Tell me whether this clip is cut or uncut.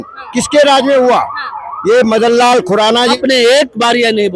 cut